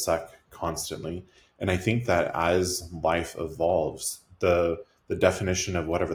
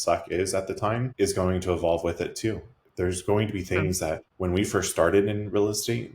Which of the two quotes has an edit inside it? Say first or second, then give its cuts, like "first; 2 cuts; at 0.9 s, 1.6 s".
second; 2 cuts; at 1.1 s, 4.3 s